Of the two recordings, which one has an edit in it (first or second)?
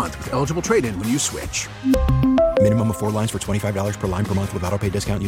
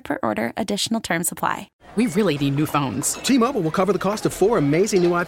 second